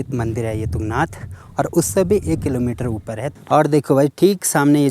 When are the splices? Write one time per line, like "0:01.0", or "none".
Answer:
0:03.3

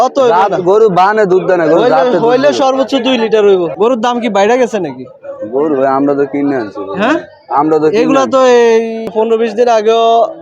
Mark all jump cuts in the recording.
0:03.7
0:09.1

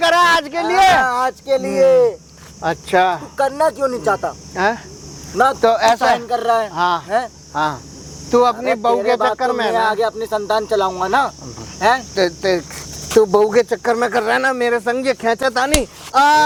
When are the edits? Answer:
none

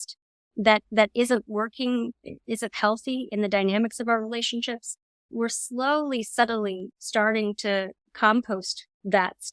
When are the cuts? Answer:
0:05.3
0:08.0

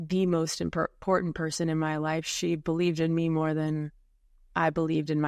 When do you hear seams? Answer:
none

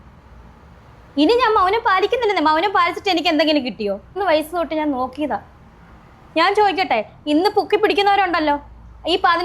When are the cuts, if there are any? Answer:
0:04.2

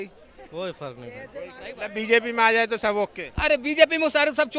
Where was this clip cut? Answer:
0:01.7

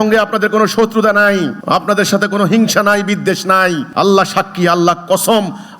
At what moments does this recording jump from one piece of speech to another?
0:01.6
0:03.8

